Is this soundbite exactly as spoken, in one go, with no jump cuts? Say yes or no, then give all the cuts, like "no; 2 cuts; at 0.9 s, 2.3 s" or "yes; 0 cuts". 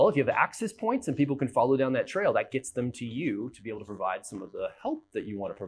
yes; 0 cuts